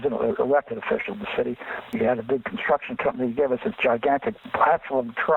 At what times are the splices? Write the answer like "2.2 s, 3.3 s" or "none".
4.4 s